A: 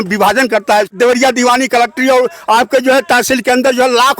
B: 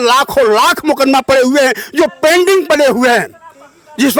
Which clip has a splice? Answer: A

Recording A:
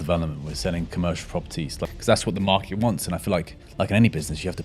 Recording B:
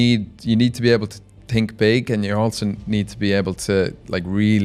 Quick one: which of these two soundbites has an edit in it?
A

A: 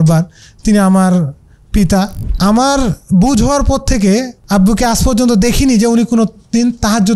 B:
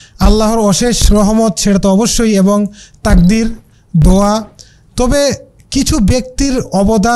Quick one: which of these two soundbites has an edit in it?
A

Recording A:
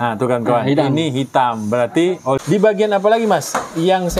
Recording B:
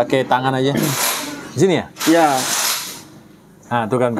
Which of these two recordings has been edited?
A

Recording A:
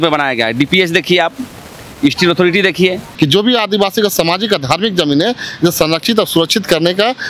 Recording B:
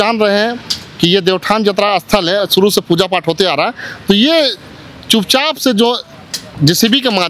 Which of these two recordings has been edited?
A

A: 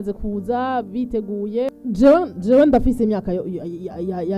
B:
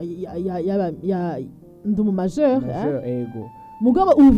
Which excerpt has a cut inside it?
A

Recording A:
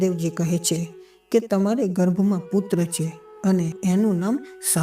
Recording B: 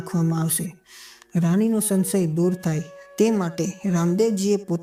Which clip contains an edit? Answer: A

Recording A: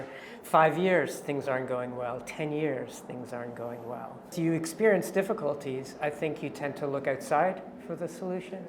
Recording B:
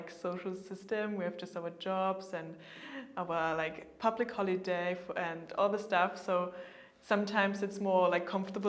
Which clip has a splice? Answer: A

